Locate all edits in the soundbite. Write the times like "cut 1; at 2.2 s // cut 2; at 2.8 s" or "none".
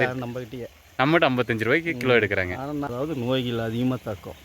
cut 1; at 2.9 s